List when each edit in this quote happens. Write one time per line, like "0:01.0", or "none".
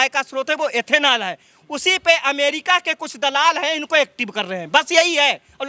none